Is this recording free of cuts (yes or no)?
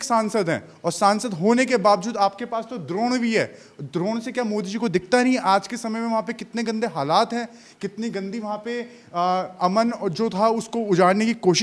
yes